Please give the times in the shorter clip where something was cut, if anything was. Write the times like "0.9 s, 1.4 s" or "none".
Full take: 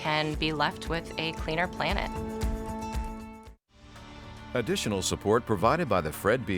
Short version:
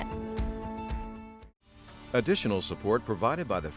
2.0 s